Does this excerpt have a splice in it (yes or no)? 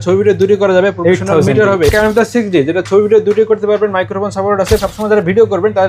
yes